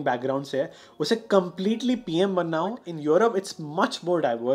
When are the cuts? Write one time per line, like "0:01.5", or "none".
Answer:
0:02.9